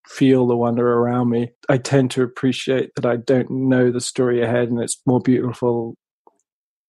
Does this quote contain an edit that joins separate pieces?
yes; 1 cut; at 1.5 s

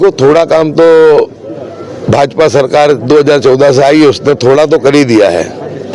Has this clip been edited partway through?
no; 0 cuts

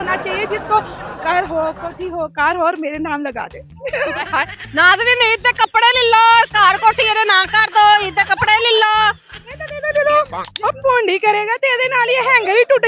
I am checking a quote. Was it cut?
yes; 1 cut; at 10.4 s

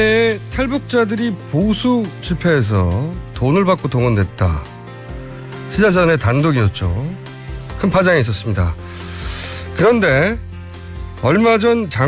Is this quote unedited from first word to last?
yes; 0 cuts

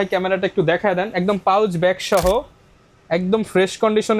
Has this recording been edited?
no; 0 cuts

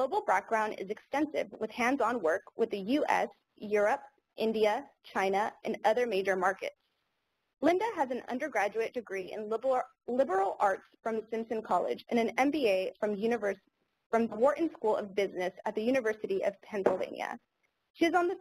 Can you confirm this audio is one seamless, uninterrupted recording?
no; 1 cut; at 3.3 s

